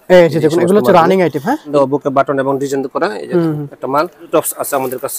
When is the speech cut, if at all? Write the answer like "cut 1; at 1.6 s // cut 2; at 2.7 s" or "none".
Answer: cut 1; at 1.7 s // cut 2; at 4.3 s